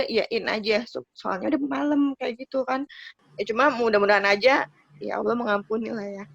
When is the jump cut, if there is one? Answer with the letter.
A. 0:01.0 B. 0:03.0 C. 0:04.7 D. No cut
B